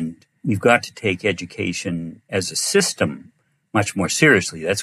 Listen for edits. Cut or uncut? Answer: uncut